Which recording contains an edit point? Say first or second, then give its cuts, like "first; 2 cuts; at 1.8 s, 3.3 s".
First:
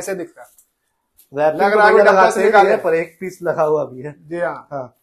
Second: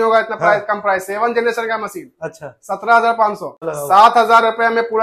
second; 1 cut; at 3.6 s